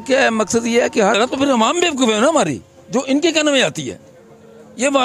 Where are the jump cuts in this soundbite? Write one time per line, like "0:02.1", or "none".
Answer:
0:01.2

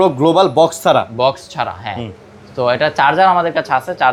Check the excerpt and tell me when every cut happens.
none

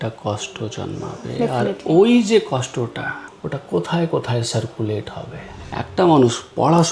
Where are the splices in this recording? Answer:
0:03.2
0:05.4

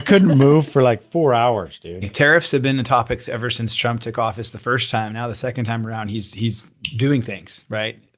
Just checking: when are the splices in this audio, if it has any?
0:02.1

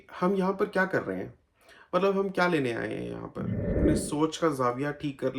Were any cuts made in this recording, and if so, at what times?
0:03.8

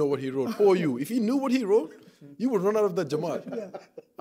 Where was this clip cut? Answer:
none

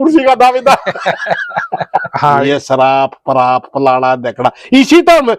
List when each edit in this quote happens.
0:02.1

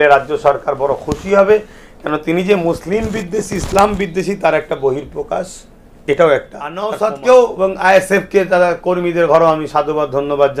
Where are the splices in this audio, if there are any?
0:06.9

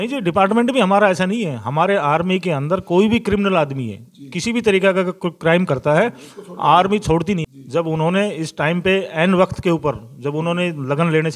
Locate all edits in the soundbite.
0:07.5

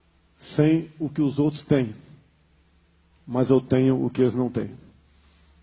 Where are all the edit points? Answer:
none

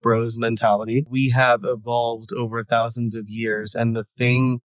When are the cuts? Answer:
0:01.1

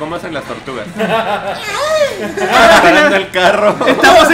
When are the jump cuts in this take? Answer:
0:02.8

